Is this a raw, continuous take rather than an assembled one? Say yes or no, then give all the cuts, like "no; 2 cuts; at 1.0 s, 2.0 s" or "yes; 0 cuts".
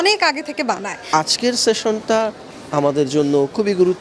no; 1 cut; at 0.9 s